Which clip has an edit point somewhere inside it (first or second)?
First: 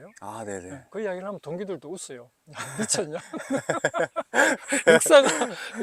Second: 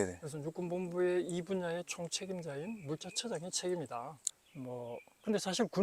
second